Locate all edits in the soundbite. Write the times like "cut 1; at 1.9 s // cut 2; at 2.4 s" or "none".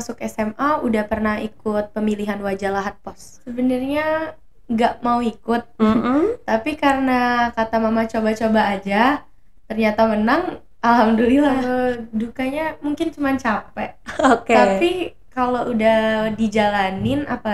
cut 1; at 3.4 s // cut 2; at 11.6 s